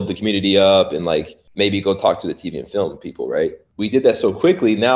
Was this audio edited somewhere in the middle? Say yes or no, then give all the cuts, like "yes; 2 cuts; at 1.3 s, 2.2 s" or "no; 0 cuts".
yes; 2 cuts; at 1.4 s, 3.6 s